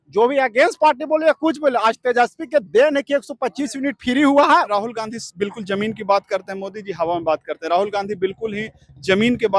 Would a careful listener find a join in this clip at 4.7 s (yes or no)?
yes